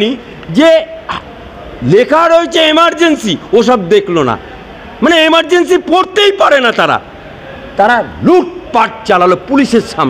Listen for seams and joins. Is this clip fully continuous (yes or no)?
yes